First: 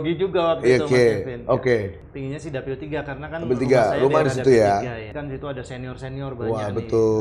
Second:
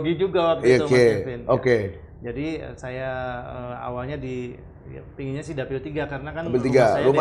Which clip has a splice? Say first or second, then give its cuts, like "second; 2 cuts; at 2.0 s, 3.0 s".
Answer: first; 2 cuts; at 2.0 s, 5.1 s